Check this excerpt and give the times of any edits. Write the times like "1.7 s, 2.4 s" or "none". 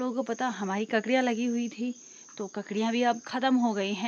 none